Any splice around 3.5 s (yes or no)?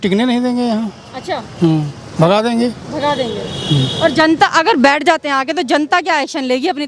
no